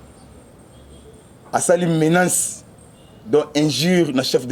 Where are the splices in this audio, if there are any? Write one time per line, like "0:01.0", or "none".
none